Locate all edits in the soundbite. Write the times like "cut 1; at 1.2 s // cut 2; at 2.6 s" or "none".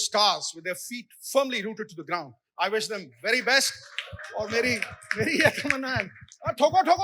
none